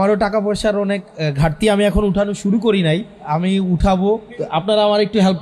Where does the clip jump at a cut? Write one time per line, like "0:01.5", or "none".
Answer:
0:03.1
0:04.3